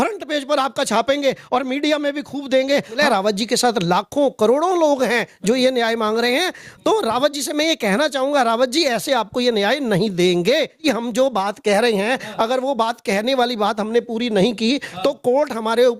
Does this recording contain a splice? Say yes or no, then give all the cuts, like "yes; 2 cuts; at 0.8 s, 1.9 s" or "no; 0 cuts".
yes; 2 cuts; at 3.0 s, 10.8 s